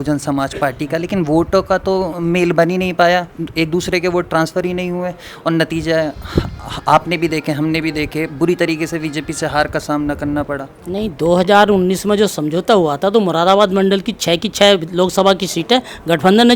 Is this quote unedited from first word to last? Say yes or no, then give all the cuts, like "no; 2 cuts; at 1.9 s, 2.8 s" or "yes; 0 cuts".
yes; 0 cuts